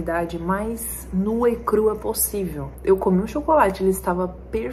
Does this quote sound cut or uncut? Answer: cut